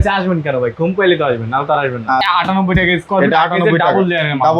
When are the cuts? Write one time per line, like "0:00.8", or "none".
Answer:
0:02.2